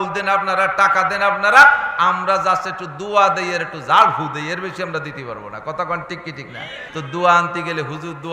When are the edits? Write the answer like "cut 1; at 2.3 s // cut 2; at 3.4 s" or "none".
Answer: cut 1; at 6.8 s